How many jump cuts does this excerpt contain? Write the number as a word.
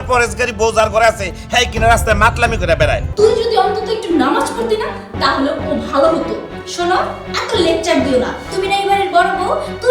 one